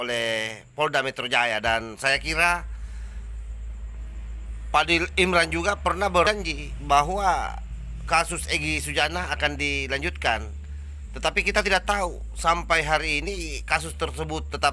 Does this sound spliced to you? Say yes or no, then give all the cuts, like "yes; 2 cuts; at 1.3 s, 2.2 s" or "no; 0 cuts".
yes; 1 cut; at 6.3 s